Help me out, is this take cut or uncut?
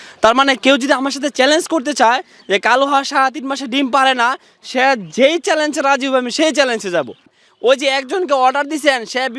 cut